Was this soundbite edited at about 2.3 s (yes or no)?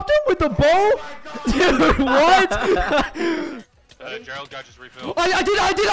no